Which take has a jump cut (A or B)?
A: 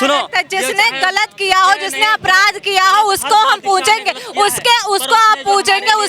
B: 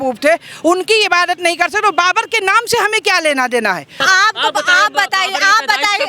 B